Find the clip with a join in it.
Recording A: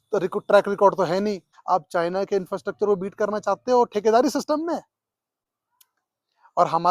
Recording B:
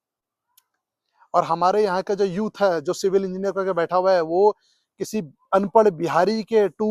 A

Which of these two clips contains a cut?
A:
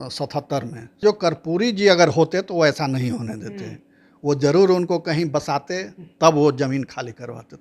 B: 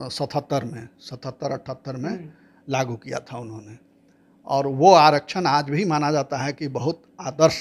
A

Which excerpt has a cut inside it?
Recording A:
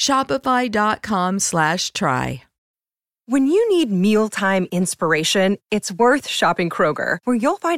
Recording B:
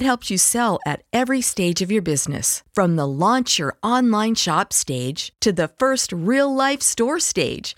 A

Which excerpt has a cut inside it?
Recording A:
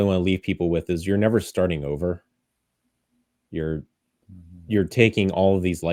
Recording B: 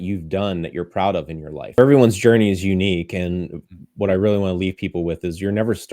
B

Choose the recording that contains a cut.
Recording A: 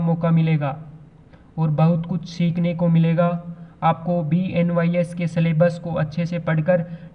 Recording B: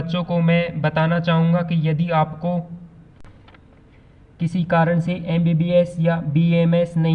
B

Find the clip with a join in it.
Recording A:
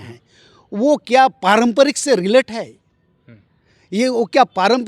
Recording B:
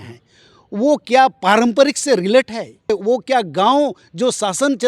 B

